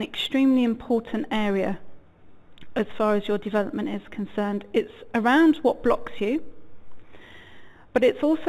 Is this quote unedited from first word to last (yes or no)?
yes